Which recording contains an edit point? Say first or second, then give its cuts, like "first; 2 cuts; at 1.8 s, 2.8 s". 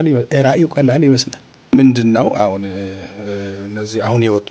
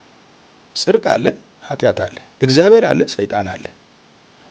first; 1 cut; at 1.7 s